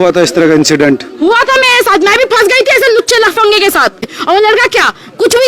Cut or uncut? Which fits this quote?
cut